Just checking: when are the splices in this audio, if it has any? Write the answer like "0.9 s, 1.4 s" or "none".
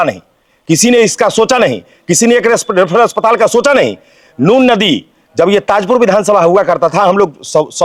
none